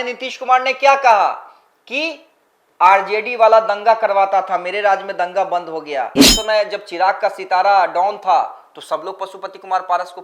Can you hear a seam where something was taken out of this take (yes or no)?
yes